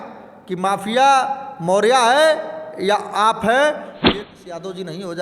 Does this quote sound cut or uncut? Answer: cut